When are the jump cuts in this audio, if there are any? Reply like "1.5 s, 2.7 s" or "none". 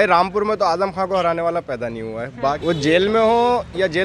2.6 s